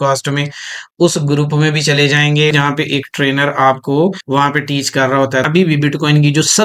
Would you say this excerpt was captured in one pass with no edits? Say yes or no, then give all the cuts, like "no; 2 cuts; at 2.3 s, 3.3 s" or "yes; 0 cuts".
no; 3 cuts; at 2.5 s, 4.2 s, 5.4 s